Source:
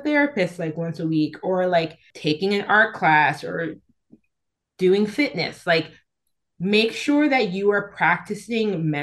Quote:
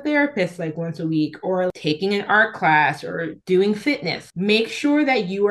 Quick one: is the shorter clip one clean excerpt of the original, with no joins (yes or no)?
no